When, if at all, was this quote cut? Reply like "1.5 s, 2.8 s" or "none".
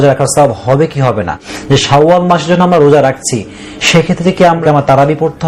1.5 s, 4.6 s